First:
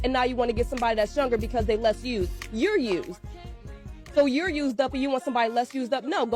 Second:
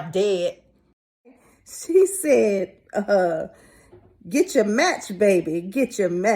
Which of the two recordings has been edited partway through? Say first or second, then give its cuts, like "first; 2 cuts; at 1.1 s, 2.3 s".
second; 1 cut; at 1.3 s